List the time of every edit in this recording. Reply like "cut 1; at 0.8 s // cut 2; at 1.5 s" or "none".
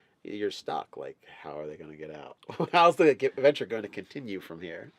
cut 1; at 4.0 s